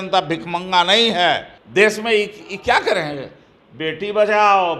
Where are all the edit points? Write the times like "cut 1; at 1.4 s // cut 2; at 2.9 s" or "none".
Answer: cut 1; at 1.5 s